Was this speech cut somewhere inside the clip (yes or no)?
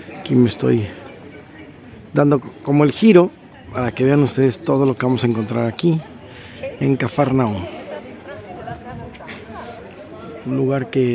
no